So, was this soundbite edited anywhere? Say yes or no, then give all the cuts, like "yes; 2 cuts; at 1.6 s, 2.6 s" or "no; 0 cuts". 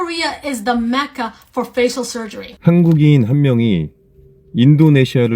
yes; 1 cut; at 2.4 s